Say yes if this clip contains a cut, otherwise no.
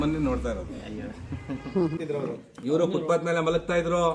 yes